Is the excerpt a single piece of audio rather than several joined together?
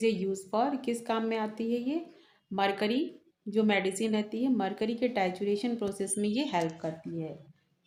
yes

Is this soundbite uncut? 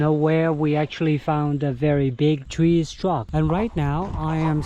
no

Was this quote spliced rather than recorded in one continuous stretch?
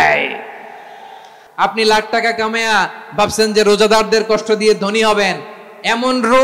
yes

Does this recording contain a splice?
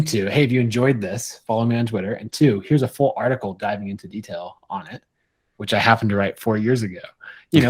no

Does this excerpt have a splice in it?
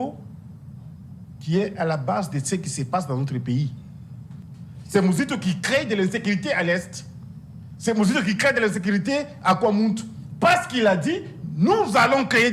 yes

